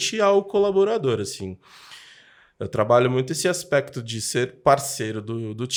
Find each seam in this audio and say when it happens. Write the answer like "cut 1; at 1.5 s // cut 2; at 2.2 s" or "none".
none